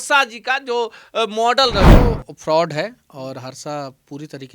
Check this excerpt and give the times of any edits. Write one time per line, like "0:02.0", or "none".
0:01.9